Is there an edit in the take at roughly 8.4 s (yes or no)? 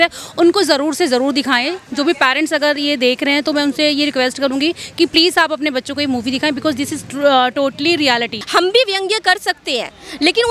yes